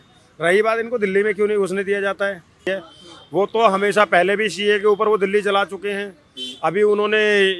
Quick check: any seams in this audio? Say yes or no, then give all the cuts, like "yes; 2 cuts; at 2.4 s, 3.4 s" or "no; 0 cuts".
yes; 1 cut; at 2.7 s